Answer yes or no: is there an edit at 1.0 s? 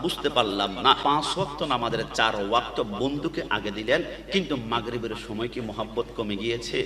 yes